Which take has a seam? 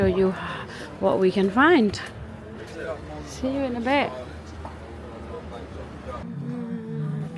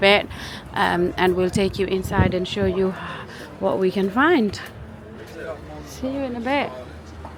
first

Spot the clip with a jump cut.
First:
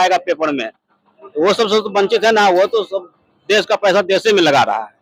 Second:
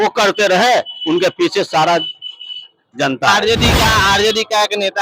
second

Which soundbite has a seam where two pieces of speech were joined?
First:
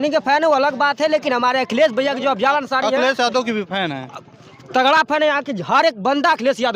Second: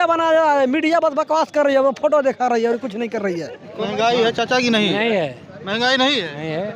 second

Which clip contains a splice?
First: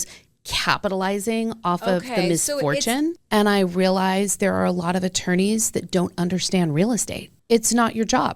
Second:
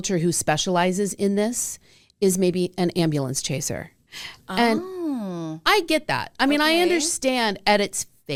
first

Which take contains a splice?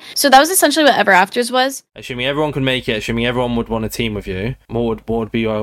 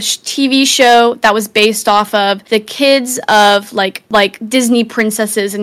first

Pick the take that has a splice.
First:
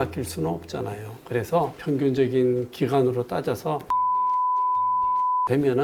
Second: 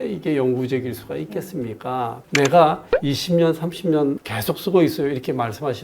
second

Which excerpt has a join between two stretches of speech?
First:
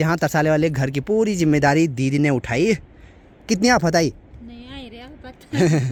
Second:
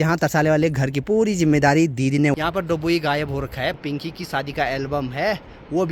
second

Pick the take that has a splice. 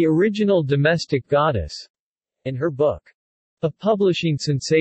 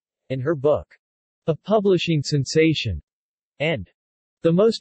second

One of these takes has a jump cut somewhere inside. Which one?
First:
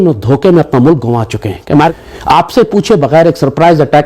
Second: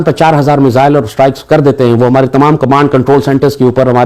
first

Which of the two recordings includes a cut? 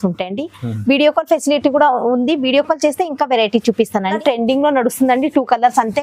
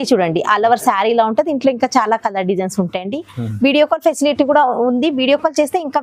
first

